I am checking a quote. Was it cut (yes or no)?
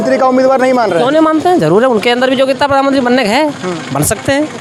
no